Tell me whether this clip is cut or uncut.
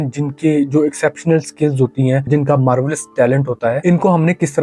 cut